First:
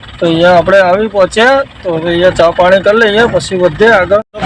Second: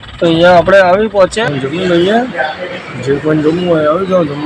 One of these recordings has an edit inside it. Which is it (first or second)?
second